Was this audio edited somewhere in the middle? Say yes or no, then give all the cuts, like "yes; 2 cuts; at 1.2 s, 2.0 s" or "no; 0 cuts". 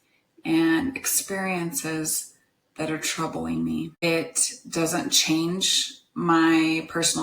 yes; 1 cut; at 4.0 s